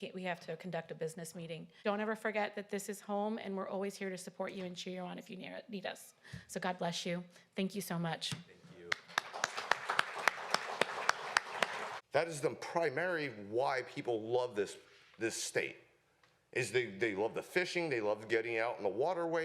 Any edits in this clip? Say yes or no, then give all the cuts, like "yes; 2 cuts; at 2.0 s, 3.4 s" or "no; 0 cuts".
yes; 2 cuts; at 1.8 s, 12.0 s